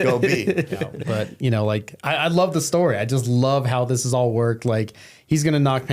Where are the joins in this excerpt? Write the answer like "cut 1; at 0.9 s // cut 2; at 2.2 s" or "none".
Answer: cut 1; at 0.9 s